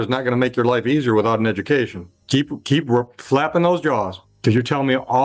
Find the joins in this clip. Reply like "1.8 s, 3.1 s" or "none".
2.1 s